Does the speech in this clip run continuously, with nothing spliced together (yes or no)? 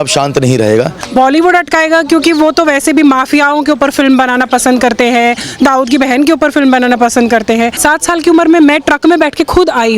no